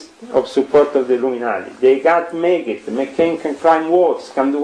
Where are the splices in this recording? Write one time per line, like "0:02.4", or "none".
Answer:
none